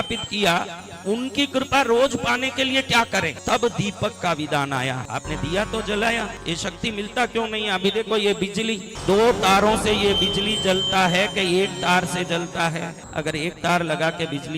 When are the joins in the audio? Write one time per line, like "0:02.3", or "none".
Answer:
0:03.4
0:05.0
0:06.4
0:08.9
0:13.0